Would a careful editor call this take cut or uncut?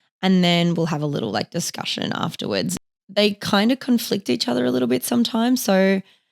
cut